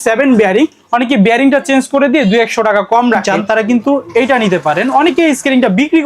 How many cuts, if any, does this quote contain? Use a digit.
1